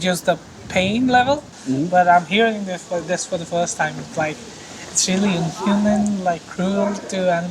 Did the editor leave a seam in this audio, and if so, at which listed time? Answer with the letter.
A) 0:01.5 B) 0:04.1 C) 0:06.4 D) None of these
A